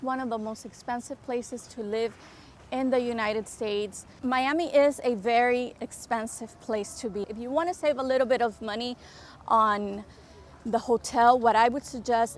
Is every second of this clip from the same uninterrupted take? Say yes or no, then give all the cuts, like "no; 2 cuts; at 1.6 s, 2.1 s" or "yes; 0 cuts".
no; 2 cuts; at 4.0 s, 7.2 s